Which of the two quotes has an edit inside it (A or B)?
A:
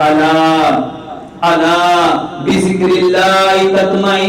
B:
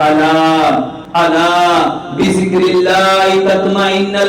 B